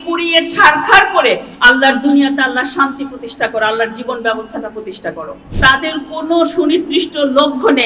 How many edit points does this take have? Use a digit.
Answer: 1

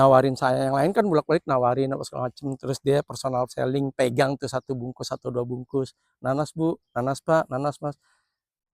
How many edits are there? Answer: 0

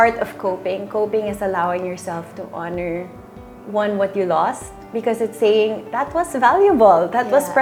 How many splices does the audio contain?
0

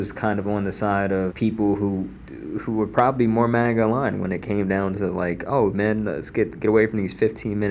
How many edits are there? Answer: 1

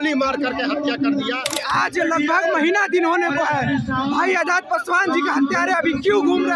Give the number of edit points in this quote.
1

